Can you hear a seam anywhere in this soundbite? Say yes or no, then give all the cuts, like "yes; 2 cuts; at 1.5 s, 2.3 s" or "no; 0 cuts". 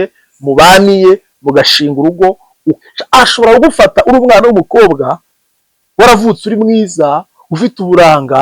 yes; 1 cut; at 2.8 s